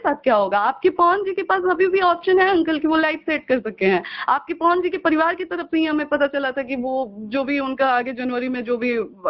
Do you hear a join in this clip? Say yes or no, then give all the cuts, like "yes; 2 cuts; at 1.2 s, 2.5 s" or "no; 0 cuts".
no; 0 cuts